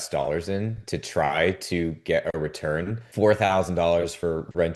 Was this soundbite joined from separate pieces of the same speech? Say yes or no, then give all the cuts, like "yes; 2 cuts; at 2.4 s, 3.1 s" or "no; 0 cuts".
yes; 1 cut; at 3.0 s